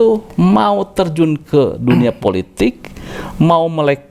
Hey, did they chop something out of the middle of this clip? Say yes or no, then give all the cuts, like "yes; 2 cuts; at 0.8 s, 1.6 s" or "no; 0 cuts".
no; 0 cuts